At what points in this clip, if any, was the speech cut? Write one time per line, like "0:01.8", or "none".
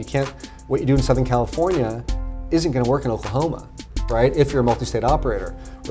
none